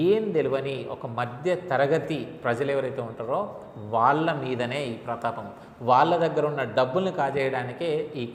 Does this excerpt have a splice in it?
no; 0 cuts

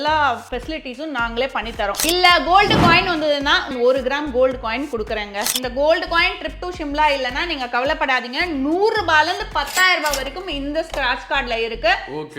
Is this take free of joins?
no; 3 cuts; at 2.0 s, 3.7 s, 5.5 s

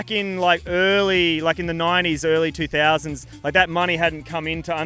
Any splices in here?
no; 0 cuts

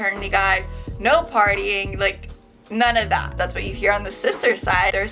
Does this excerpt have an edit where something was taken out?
yes; 1 cut; at 3.3 s

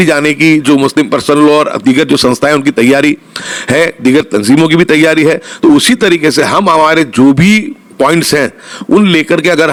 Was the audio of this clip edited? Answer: no; 0 cuts

